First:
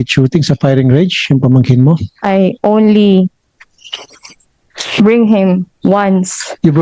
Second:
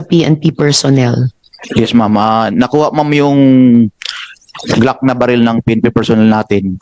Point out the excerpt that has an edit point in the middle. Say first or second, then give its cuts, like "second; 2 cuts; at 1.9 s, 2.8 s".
first; 1 cut; at 2.2 s